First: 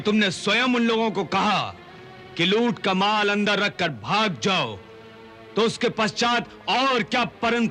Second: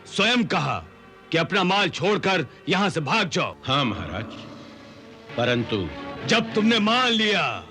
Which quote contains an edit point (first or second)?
second